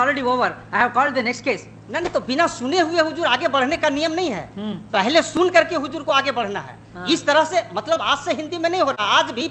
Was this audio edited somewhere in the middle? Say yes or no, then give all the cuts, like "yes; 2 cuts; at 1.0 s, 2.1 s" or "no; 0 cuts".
no; 0 cuts